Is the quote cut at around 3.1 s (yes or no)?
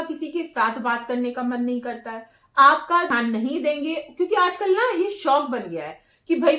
yes